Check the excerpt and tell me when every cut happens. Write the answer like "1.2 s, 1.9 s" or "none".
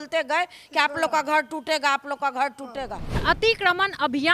3.2 s